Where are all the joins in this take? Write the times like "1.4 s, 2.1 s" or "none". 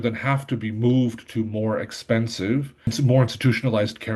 2.8 s